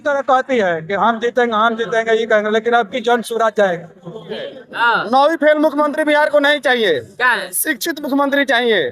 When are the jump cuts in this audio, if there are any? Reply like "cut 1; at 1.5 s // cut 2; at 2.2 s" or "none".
cut 1; at 4.6 s